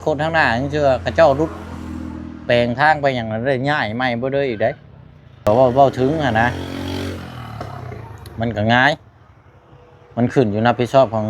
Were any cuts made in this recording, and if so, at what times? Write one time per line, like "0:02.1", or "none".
0:05.5